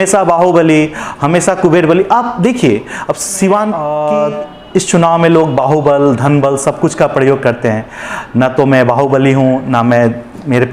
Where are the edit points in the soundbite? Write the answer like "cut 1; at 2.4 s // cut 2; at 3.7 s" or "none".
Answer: cut 1; at 4.0 s